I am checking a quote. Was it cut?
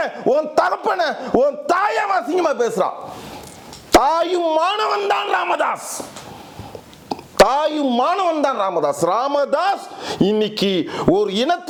no; 0 cuts

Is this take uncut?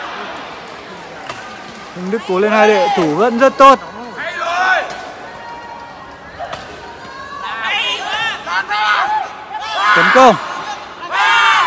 yes; 0 cuts

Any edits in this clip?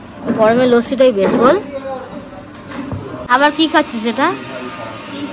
no; 0 cuts

